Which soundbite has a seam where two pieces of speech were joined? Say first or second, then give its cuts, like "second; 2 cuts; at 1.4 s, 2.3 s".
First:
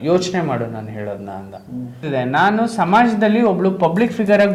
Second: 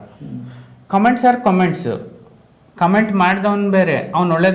first; 1 cut; at 2.0 s